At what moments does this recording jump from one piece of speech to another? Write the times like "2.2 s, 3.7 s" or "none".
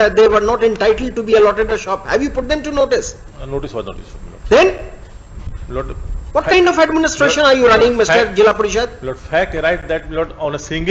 none